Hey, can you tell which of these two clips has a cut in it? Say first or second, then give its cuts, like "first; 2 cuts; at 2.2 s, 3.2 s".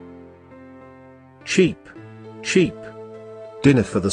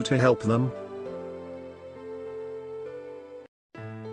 second; 1 cut; at 2.9 s